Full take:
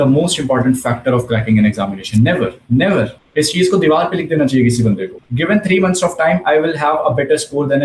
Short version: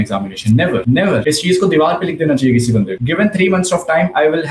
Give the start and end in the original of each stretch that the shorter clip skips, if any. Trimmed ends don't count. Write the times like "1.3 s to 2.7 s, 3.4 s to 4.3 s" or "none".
2.7 s to 3.1 s, 5.1 s to 5.3 s